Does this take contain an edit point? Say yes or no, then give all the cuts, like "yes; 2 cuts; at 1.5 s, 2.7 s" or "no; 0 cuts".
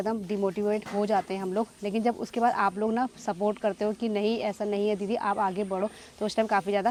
no; 0 cuts